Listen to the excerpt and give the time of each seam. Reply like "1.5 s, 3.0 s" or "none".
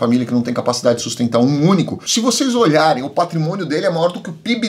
2.0 s